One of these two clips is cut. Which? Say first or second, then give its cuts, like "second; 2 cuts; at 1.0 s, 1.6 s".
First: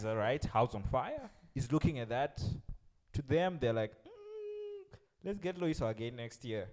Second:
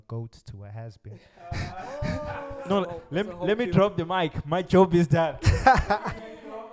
second; 1 cut; at 2.6 s